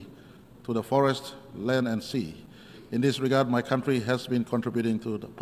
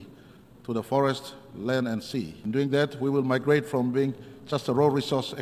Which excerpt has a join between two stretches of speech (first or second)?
second